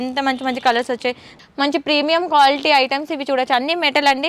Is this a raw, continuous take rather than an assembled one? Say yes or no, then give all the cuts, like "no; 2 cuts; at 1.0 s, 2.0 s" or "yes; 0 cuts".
no; 1 cut; at 1.3 s